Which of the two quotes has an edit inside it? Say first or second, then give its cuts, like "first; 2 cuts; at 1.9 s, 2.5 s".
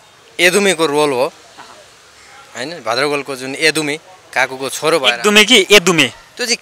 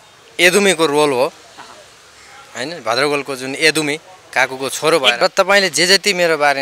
second; 1 cut; at 5.2 s